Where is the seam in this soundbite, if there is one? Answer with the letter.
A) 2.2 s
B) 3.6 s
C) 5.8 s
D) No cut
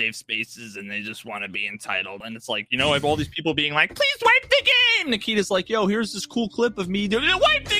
A